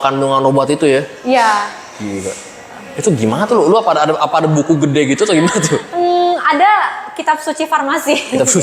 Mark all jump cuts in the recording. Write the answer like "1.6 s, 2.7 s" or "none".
none